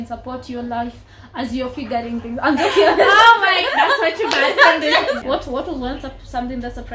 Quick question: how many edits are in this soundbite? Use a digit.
1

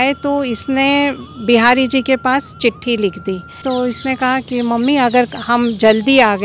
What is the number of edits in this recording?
1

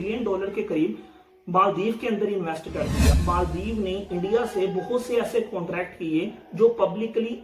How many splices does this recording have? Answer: 1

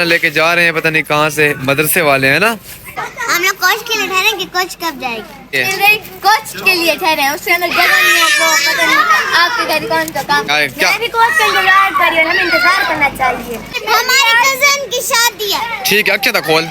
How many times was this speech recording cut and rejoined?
4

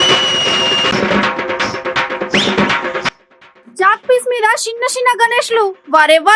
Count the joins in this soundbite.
1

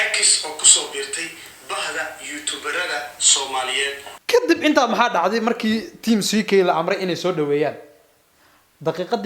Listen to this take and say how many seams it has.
1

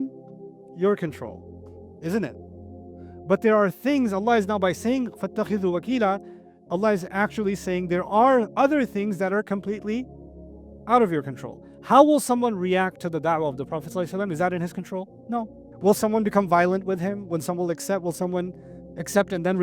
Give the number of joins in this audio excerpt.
1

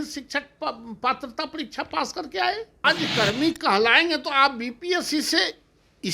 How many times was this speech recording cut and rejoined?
1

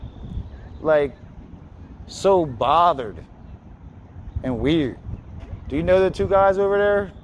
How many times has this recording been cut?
0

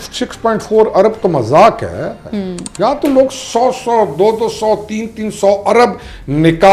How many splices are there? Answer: 0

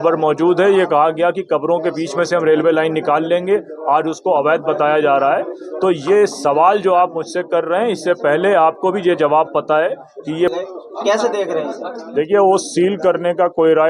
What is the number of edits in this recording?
1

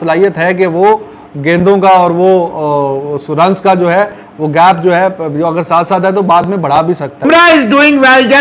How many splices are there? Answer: 1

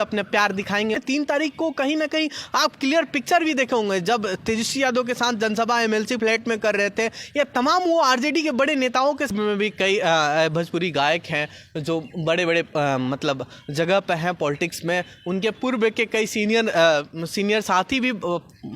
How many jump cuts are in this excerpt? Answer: 2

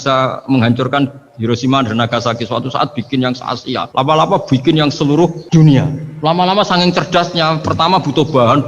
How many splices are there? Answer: 3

